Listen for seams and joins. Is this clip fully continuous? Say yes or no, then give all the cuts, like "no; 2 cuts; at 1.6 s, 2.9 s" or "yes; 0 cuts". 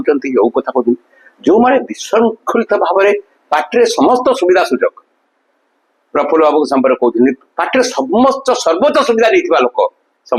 yes; 0 cuts